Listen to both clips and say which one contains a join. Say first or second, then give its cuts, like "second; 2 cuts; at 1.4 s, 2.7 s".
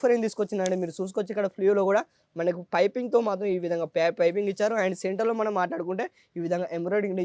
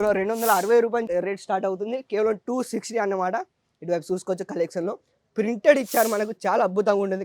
second; 1 cut; at 1.1 s